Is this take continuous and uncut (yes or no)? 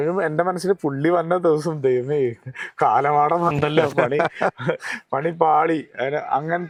yes